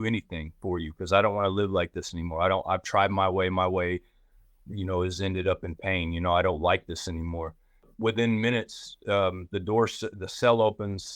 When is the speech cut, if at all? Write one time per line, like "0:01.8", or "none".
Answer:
0:07.9